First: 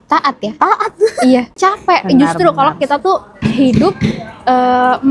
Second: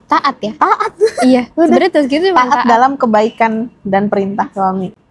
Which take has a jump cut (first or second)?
first